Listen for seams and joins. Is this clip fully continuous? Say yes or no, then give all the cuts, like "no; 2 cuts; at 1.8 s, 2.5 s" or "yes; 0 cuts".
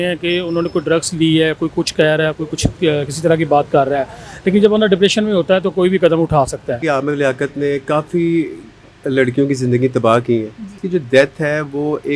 no; 2 cuts; at 6.8 s, 10.8 s